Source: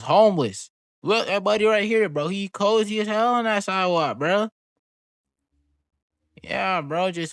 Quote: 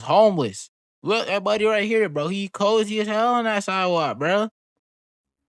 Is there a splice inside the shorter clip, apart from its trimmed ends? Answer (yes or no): no